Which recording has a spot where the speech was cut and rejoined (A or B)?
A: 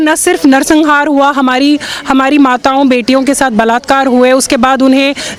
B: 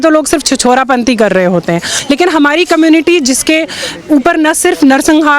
B